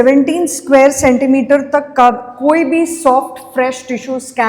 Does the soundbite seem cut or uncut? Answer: uncut